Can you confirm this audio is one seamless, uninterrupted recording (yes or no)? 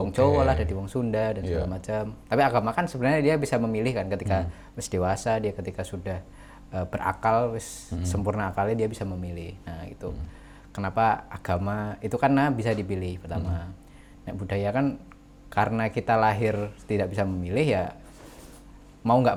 yes